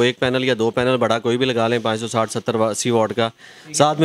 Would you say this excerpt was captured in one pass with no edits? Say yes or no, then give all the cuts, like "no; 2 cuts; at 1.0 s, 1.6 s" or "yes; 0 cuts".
yes; 0 cuts